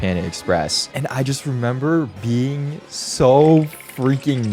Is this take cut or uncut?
uncut